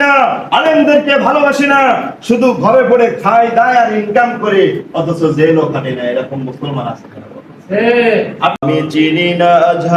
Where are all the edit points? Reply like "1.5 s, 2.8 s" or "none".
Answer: 8.6 s